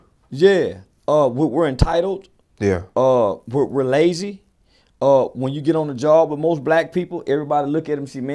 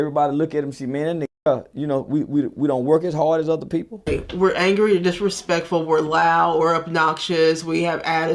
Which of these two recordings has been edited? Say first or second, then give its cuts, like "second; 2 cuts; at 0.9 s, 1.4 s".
second; 1 cut; at 4.1 s